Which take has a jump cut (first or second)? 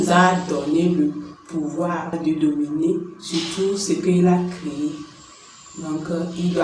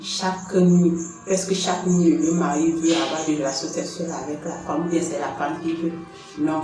first